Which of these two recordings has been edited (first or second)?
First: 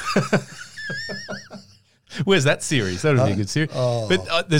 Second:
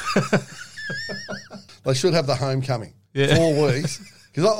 second